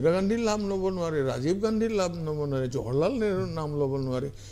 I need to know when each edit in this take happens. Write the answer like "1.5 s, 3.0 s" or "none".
none